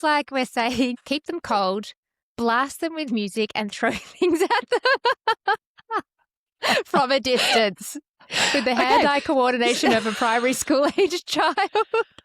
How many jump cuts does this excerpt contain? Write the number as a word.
one